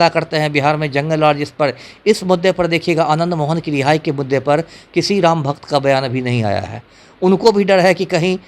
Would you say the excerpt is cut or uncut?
uncut